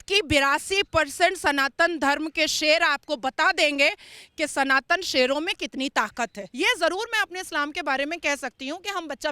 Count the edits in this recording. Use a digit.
1